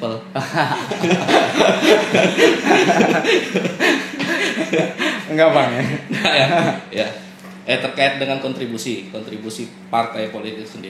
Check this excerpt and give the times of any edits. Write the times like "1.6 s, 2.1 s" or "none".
none